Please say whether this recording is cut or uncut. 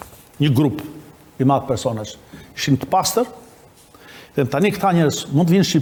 uncut